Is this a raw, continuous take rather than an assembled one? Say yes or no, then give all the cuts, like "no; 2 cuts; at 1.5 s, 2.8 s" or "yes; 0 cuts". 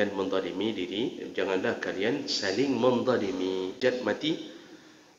no; 1 cut; at 3.8 s